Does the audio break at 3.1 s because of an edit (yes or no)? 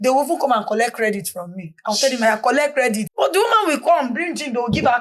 yes